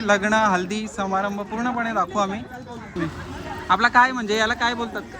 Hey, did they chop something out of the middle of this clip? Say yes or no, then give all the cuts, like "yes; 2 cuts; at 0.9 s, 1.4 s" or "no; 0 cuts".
yes; 1 cut; at 3.0 s